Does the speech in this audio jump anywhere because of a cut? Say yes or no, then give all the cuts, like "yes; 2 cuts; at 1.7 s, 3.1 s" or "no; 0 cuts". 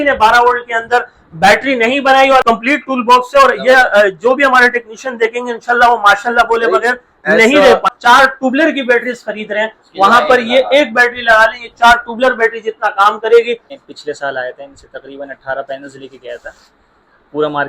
yes; 3 cuts; at 2.4 s, 7.9 s, 13.7 s